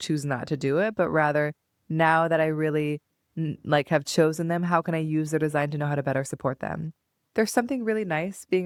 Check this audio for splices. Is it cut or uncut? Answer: uncut